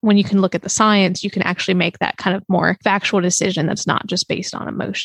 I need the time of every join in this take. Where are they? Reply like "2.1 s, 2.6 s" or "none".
none

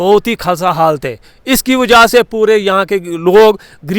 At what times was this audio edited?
none

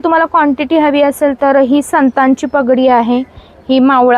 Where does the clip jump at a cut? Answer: none

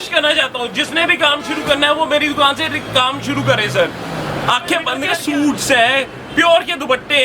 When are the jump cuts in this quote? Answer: 5.1 s

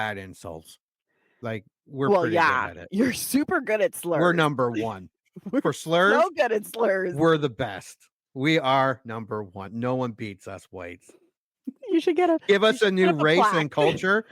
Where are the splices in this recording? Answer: 1.3 s

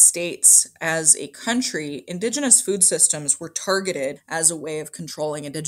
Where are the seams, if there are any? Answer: 4.2 s

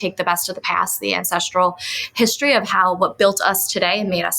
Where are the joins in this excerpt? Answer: none

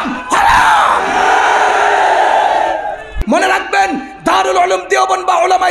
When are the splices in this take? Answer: 3.1 s

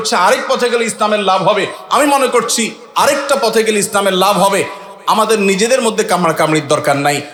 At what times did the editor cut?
none

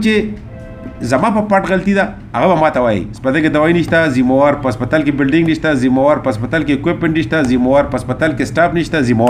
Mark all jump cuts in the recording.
none

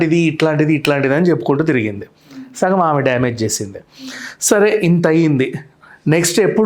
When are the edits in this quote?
none

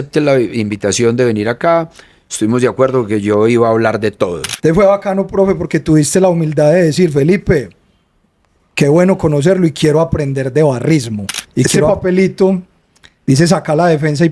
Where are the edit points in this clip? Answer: 4.5 s, 11.9 s

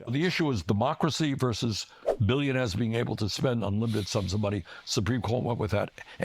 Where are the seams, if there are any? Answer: none

